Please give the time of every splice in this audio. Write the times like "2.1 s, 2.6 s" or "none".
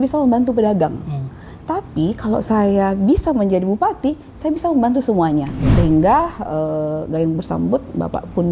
5.6 s

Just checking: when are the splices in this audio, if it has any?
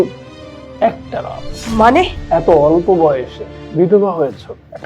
1.5 s, 2.2 s

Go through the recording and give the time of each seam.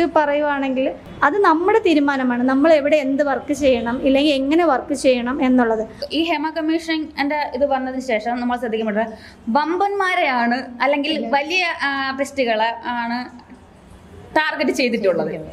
1.0 s, 6.0 s

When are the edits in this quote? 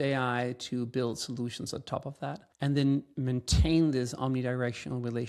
2.5 s

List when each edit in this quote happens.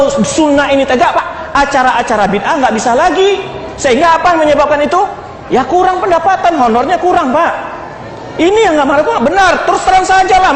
1.2 s

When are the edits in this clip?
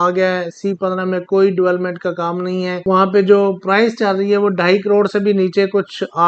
2.7 s

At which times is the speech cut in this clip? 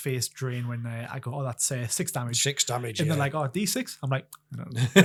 none

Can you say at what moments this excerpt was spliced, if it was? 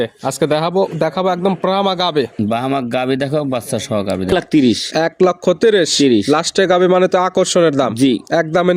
4.3 s

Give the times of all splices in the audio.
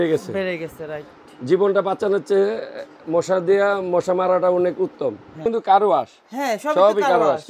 5.5 s

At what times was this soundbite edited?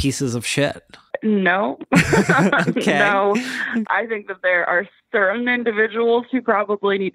1.1 s, 3.8 s

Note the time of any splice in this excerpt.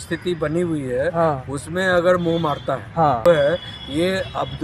3.3 s

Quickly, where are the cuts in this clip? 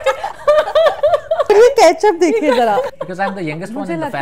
1.5 s, 2.9 s

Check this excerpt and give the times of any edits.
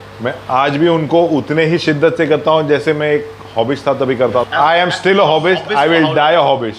4.2 s

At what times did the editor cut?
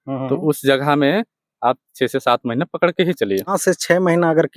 3.6 s

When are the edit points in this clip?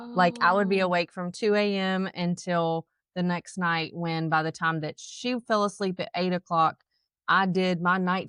none

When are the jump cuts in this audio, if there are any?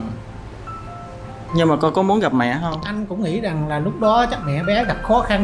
3.3 s

